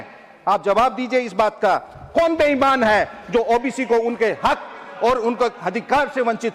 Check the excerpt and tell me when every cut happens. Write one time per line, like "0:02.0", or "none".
none